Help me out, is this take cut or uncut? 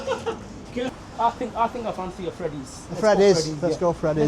cut